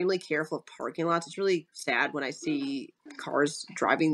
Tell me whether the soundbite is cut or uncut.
uncut